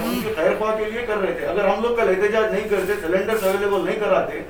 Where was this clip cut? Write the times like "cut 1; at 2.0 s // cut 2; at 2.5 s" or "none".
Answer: none